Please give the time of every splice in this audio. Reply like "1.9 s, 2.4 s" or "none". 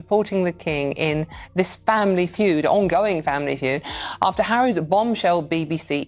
none